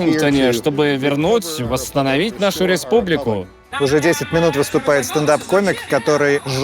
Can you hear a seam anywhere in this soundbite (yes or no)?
yes